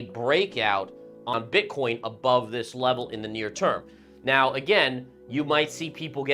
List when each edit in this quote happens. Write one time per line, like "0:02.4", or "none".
0:01.3